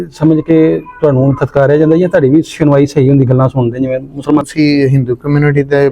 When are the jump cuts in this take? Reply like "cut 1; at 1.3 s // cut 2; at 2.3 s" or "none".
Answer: cut 1; at 4.5 s